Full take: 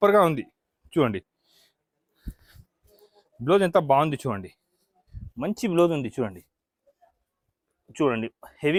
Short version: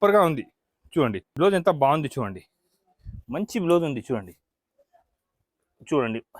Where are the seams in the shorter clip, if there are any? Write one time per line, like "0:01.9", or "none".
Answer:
0:01.2